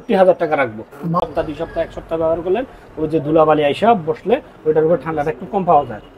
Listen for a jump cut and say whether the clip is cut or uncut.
cut